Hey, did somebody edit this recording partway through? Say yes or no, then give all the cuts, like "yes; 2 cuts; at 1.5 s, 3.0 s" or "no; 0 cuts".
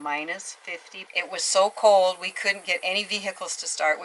no; 0 cuts